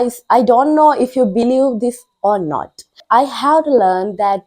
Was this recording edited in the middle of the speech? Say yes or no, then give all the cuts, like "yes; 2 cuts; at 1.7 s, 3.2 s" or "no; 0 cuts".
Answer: yes; 1 cut; at 3.0 s